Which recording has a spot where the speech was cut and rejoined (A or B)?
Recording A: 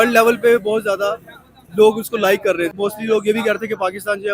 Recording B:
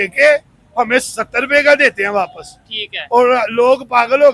A